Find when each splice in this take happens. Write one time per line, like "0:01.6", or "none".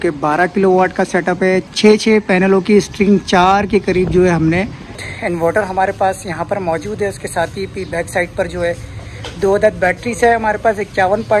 0:01.7
0:05.1